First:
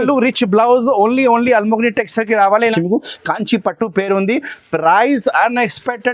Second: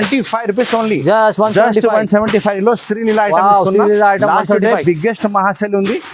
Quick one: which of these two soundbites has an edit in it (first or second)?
first